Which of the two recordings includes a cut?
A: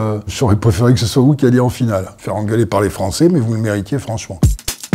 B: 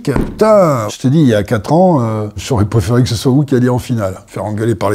B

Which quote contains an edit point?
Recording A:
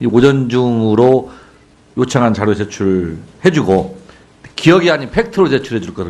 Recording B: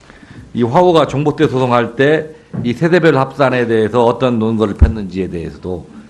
A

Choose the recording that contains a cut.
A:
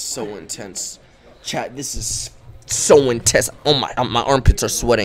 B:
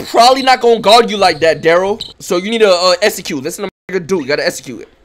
B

